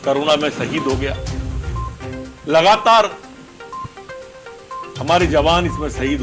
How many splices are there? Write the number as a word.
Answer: four